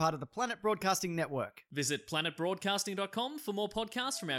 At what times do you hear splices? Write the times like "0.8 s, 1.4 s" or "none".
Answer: none